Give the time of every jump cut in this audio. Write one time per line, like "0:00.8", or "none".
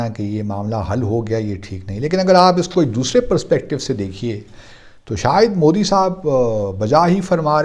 none

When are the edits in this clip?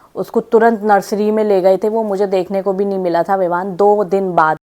none

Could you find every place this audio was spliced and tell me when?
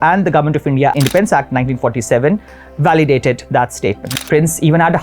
0:00.9
0:04.0

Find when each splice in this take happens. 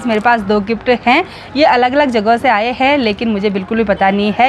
none

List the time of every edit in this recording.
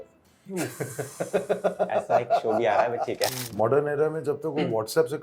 0:03.3

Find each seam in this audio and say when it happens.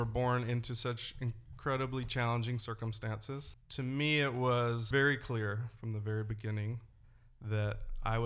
0:03.6
0:04.8

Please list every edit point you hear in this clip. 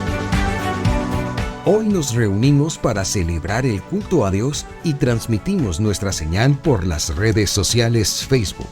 0:01.5

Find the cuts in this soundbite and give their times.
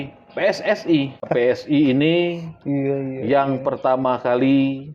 0:01.3

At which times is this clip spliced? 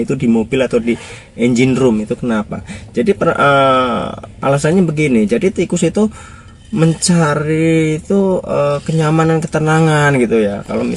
none

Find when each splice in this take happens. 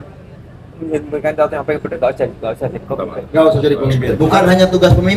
0:04.2

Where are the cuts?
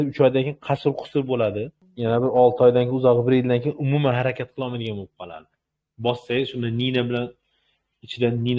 0:01.8

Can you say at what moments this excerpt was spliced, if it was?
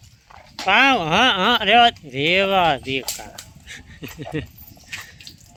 none

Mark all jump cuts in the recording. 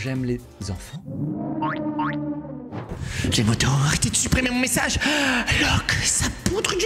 0:02.5

